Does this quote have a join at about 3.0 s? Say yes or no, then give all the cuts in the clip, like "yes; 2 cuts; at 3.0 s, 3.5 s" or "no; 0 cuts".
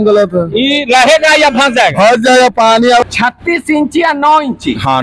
yes; 1 cut; at 3.0 s